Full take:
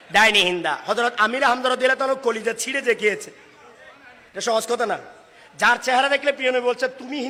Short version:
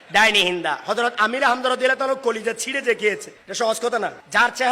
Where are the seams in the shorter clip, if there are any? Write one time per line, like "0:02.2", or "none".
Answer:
0:03.4
0:04.0